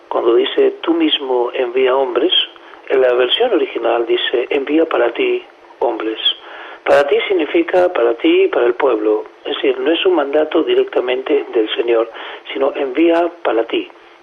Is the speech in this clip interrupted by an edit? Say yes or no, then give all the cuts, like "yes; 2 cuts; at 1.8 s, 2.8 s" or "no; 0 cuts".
yes; 1 cut; at 7.1 s